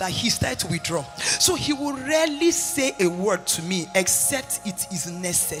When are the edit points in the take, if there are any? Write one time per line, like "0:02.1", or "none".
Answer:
none